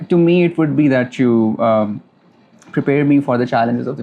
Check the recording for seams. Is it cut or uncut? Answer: uncut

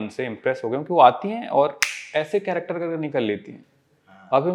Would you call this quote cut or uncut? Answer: uncut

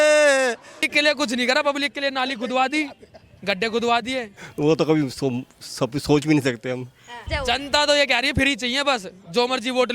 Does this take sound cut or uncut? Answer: cut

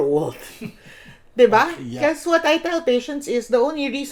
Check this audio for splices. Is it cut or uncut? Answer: uncut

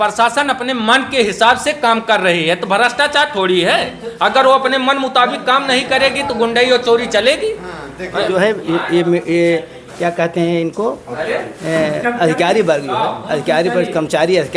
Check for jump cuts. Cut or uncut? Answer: cut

